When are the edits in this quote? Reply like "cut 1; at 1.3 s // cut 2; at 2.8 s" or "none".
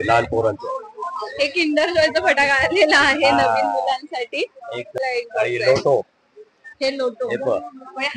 cut 1; at 5.0 s